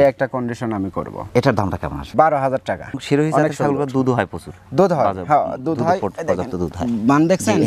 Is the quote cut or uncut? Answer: uncut